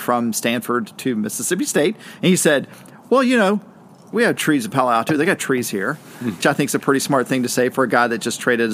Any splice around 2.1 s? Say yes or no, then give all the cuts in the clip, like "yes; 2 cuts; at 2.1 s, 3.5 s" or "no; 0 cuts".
no; 2 cuts; at 4.1 s, 6.4 s